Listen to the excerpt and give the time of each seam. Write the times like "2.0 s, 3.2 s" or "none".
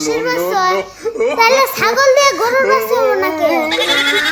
none